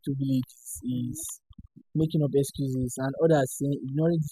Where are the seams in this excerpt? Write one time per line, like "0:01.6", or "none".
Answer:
none